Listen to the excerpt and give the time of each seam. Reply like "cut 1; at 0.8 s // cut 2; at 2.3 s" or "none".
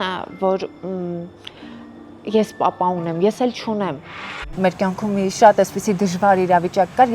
cut 1; at 4.4 s